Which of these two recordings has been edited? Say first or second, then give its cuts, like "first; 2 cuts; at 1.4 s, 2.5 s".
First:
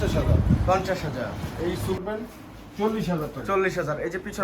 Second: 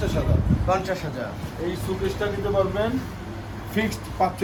first; 1 cut; at 2.0 s